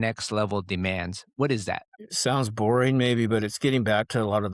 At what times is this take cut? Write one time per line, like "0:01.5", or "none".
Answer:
0:01.9